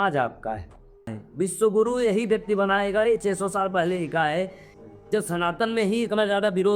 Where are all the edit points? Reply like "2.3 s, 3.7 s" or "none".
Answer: 1.2 s, 4.6 s